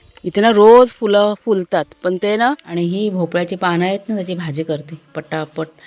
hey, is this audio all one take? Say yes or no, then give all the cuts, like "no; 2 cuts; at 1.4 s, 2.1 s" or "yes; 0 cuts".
no; 1 cut; at 2.6 s